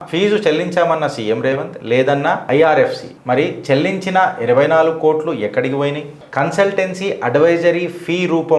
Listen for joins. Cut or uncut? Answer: uncut